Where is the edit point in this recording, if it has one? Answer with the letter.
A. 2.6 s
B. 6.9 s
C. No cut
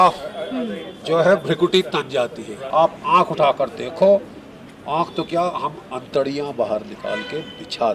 A